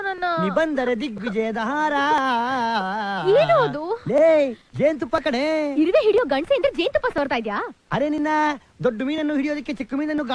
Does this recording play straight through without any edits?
yes; 0 cuts

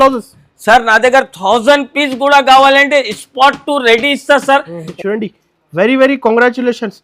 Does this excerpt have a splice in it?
yes; 1 cut; at 4.9 s

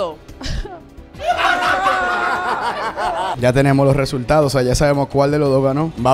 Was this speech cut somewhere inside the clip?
yes; 1 cut; at 3.3 s

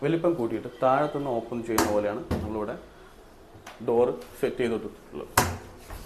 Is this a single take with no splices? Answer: yes; 0 cuts

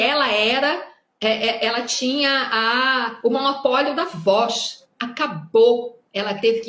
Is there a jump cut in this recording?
no; 0 cuts

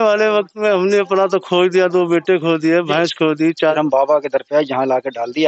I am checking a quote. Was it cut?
yes; 1 cut; at 3.7 s

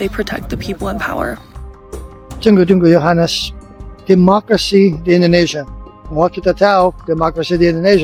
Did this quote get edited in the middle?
no; 0 cuts

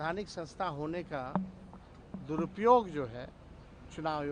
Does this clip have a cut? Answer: no; 0 cuts

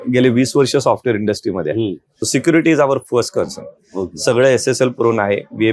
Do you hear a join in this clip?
yes; 1 cut; at 2.1 s

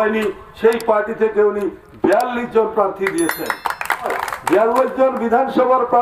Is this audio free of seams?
no; 1 cut; at 4.2 s

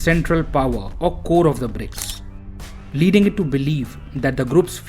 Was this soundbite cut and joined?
no; 0 cuts

